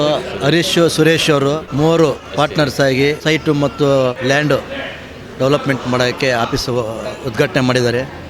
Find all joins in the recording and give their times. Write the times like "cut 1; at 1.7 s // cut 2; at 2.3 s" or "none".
none